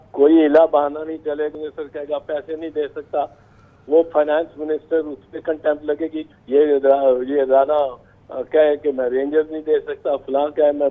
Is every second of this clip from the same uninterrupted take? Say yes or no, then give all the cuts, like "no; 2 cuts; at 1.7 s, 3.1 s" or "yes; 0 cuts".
no; 2 cuts; at 1.5 s, 6.2 s